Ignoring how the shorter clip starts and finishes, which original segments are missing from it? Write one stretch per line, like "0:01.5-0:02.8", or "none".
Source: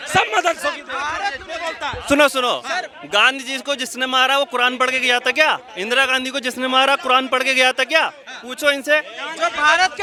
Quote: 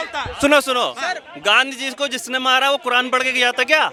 none